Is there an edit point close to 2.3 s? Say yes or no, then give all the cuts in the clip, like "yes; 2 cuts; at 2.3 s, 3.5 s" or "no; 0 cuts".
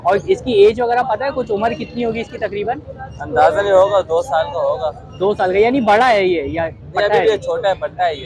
no; 0 cuts